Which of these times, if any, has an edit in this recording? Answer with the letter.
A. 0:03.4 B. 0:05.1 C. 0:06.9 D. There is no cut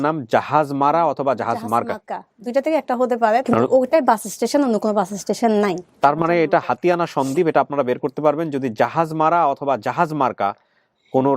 A